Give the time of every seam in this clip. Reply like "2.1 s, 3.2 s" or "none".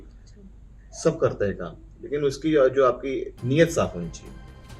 3.3 s